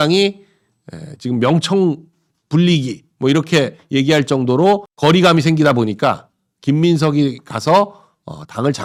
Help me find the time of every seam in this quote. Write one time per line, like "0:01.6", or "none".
none